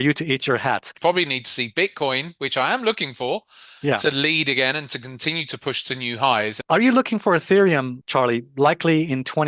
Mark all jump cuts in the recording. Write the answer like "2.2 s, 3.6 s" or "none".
0.9 s, 6.6 s